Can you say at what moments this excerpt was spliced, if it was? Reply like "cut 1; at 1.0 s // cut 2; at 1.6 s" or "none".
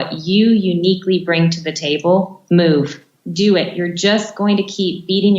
cut 1; at 2.4 s // cut 2; at 3.1 s